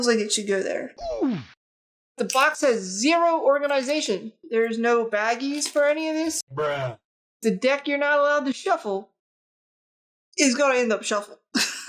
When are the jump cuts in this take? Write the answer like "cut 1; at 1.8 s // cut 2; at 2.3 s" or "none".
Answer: cut 1; at 0.9 s // cut 2; at 2.2 s // cut 3; at 7.4 s